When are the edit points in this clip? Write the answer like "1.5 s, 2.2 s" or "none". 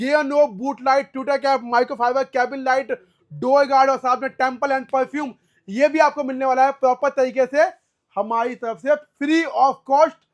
none

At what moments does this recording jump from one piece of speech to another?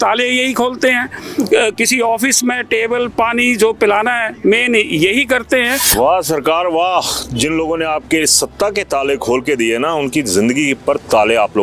none

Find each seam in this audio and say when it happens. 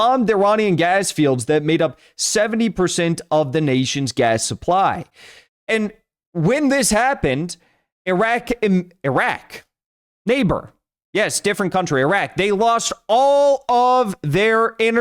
none

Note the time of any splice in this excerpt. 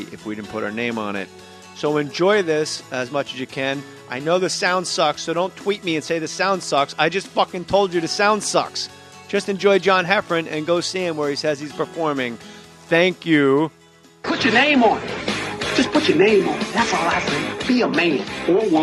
8.7 s

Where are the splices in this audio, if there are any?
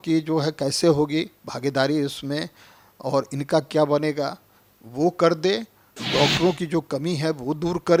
none

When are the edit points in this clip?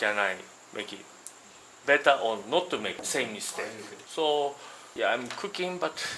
none

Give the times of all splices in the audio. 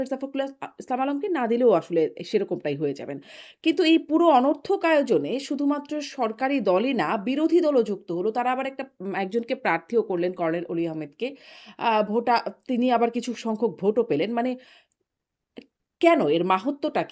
none

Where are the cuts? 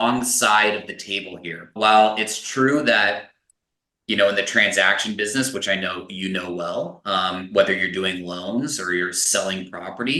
none

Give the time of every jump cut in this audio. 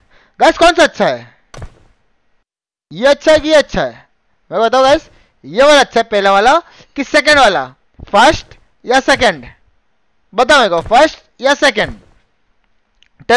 none

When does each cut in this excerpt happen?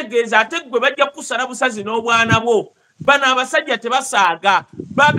none

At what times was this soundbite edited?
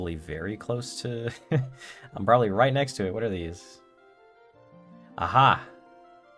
none

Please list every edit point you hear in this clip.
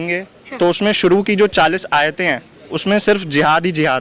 none

